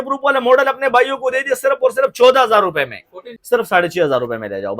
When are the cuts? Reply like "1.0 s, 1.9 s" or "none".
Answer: 3.3 s